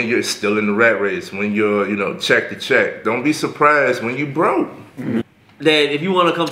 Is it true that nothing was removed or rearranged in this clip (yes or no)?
no